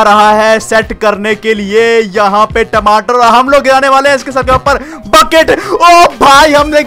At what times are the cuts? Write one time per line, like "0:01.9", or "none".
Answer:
none